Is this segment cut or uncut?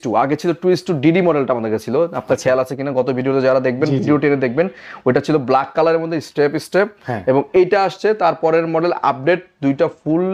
uncut